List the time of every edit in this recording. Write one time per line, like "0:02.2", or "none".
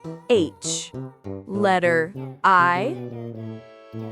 0:03.0